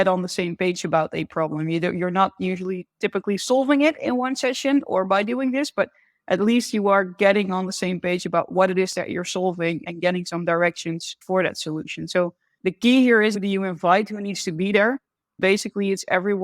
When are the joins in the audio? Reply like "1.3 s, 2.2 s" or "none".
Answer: 13.4 s, 15.4 s

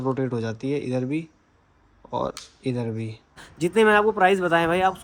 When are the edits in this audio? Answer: 3.4 s

